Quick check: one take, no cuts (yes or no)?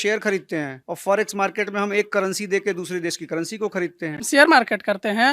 no